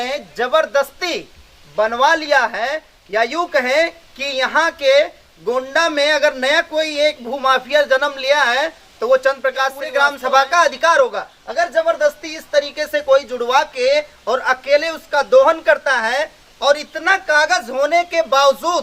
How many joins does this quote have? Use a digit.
1